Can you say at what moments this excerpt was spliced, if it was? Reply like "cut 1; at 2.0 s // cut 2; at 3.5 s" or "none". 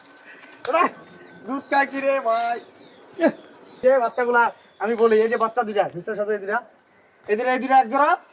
cut 1; at 3.8 s